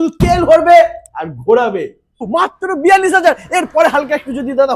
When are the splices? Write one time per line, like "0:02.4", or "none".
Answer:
0:02.3